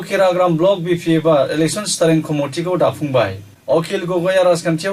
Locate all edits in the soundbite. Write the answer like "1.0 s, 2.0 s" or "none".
3.5 s

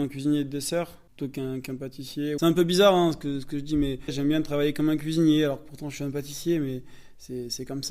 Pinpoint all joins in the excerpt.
1.0 s, 2.4 s, 4.2 s

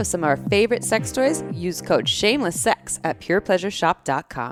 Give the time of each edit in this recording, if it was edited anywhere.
none

